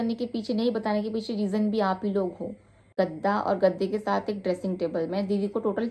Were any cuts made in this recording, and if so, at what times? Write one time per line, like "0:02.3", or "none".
0:02.9